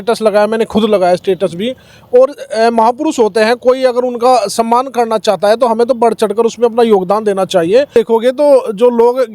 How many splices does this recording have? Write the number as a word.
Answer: one